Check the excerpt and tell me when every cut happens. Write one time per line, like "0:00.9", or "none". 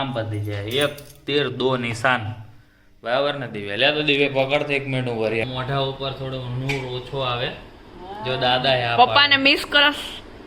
0:05.4